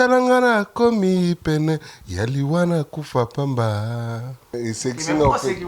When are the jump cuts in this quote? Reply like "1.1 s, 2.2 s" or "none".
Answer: 4.6 s